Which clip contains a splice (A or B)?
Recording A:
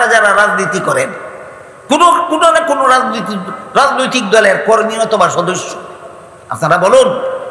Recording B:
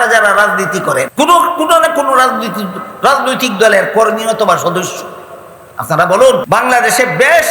B